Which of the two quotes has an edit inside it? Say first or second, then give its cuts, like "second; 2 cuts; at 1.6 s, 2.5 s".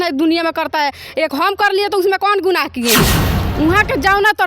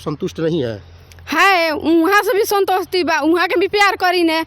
first; 1 cut; at 3.2 s